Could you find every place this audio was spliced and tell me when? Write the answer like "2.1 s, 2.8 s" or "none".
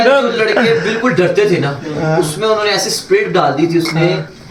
none